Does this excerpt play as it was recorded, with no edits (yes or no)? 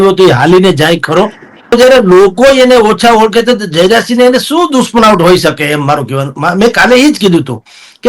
no